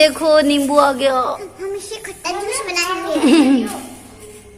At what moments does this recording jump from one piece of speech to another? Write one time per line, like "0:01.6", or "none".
none

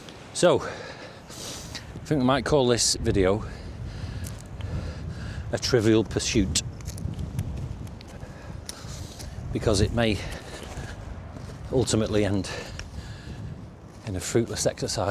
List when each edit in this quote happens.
none

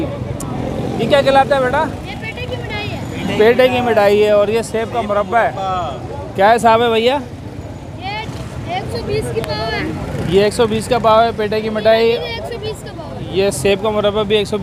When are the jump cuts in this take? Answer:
none

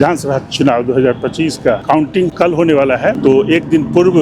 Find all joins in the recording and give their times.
0:02.0
0:03.2

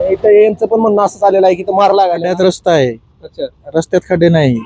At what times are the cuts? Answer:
0:02.2

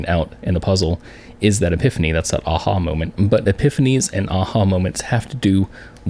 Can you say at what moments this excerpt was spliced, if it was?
none

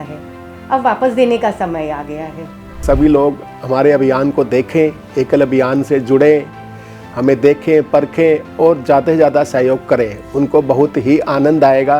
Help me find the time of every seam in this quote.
0:02.8

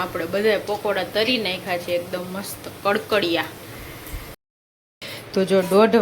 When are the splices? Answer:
0:04.4

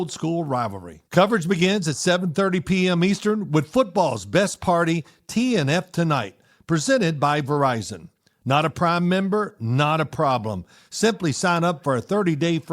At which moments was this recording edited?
0:00.9

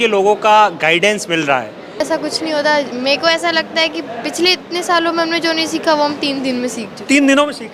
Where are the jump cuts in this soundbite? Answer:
0:02.0

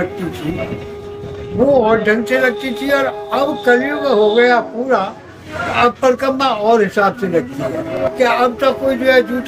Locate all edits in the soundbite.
0:07.8

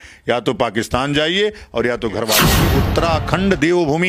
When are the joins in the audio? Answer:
0:02.6

